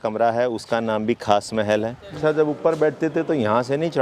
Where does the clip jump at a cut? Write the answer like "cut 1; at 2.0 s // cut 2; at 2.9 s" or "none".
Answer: cut 1; at 2.2 s